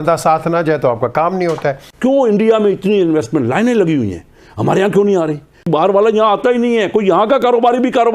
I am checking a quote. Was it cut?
yes; 2 cuts; at 1.9 s, 5.7 s

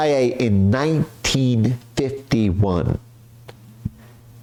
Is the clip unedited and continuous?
yes; 0 cuts

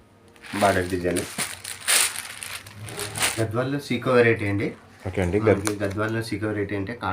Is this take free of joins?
no; 1 cut; at 3.4 s

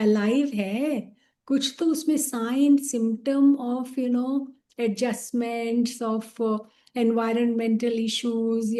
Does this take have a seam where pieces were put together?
no; 0 cuts

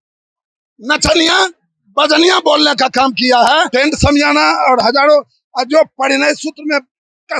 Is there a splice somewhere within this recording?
yes; 1 cut; at 3.7 s

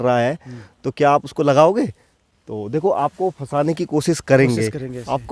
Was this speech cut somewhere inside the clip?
no; 0 cuts

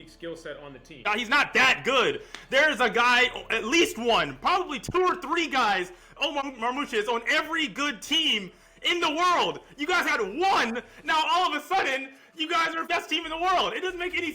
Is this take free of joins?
no; 3 cuts; at 1.0 s, 6.4 s, 12.8 s

